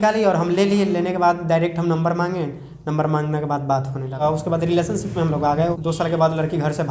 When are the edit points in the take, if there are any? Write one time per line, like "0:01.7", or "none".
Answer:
0:04.2
0:05.7